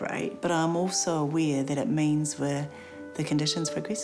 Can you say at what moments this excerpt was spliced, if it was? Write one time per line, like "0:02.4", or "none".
none